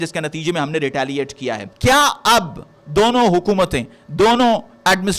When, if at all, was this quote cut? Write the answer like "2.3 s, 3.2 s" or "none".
1.6 s